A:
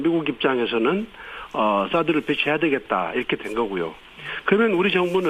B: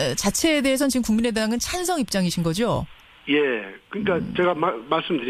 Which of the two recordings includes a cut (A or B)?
A